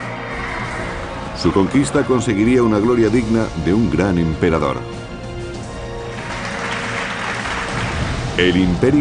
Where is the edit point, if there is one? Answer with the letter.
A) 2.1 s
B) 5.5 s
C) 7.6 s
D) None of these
D